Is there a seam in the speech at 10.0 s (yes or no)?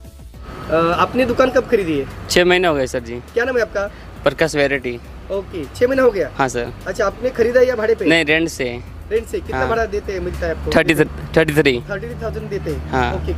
no